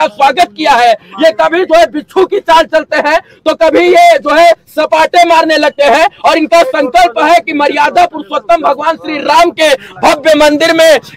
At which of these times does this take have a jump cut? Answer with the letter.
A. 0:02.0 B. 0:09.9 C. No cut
C